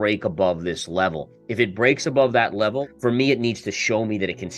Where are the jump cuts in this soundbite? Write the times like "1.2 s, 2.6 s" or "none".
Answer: 2.8 s